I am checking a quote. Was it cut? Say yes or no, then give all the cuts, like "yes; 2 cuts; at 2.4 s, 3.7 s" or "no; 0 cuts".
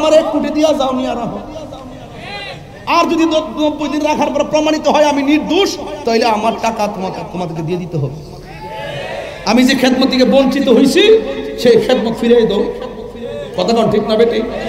no; 0 cuts